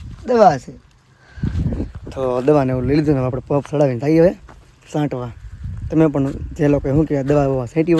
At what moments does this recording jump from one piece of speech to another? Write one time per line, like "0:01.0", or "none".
none